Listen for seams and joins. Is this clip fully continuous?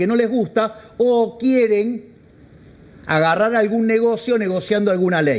yes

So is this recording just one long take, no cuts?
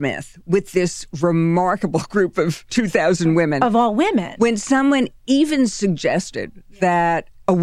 yes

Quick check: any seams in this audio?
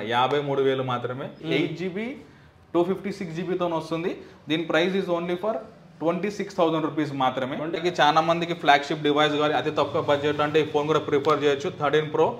yes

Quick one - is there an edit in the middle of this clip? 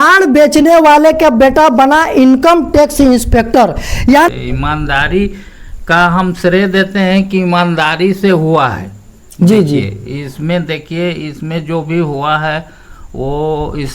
yes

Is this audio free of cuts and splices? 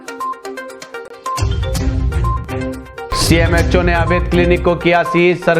no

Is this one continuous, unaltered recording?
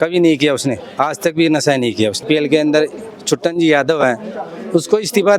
no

